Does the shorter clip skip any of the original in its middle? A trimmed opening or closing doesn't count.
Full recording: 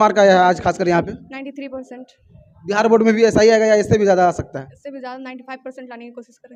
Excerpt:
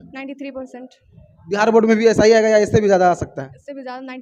no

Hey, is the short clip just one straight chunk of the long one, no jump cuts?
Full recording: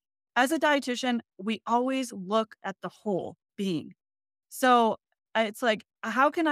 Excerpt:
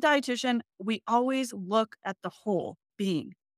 yes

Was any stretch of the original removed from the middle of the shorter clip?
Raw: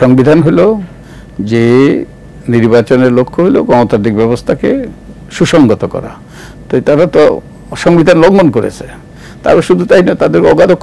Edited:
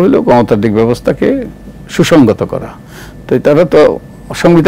no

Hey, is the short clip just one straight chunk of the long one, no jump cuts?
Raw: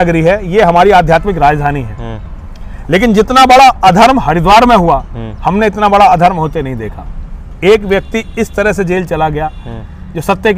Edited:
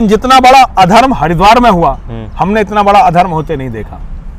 yes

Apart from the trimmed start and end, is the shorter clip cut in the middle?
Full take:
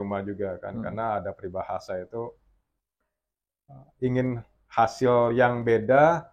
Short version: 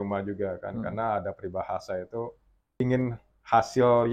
yes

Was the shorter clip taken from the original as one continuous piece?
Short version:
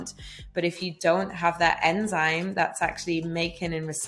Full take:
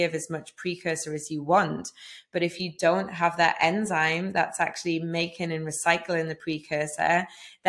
yes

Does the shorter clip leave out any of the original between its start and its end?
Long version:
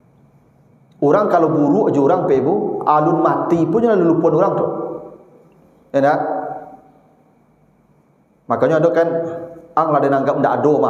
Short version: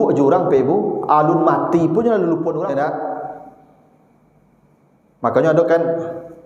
yes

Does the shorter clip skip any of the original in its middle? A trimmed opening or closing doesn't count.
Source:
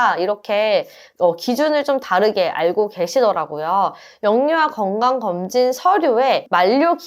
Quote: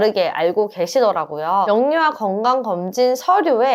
yes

